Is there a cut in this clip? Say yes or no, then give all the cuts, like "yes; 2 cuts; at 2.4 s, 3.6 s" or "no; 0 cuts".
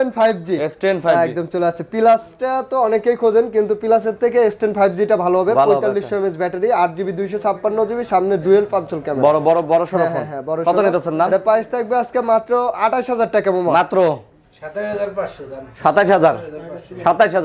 no; 0 cuts